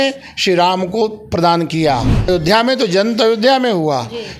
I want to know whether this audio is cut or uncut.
cut